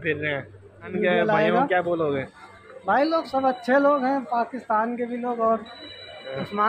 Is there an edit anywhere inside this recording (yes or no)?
yes